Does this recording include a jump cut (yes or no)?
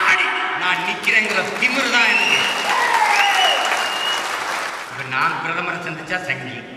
yes